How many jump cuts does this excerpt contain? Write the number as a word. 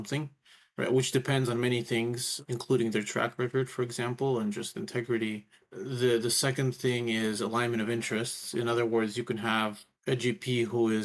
two